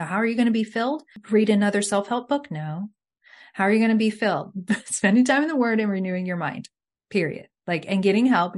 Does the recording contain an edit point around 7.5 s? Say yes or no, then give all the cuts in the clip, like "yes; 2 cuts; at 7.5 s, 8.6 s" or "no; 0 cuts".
no; 1 cut; at 1.1 s